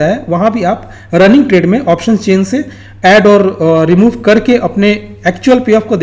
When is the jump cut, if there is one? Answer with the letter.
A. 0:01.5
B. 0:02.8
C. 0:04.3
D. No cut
D